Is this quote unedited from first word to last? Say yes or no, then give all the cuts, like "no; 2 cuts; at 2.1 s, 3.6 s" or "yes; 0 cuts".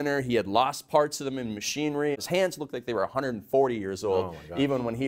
no; 1 cut; at 2.1 s